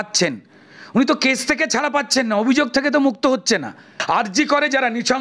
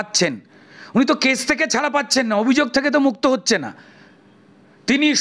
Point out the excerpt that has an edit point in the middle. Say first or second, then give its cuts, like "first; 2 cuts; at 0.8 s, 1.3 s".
first; 1 cut; at 3.9 s